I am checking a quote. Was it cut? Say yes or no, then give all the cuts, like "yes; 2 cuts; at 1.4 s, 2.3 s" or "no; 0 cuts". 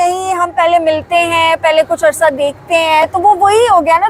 no; 0 cuts